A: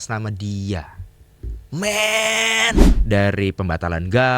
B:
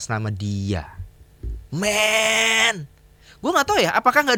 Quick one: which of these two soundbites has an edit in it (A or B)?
A